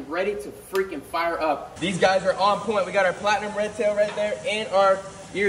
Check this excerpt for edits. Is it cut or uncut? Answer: cut